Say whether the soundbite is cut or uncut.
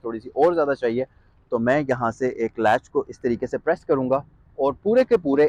uncut